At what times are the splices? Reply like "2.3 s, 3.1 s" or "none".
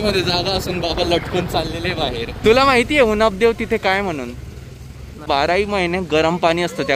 2.4 s, 5.2 s